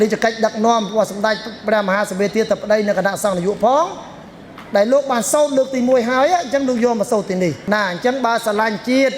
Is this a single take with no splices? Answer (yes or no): no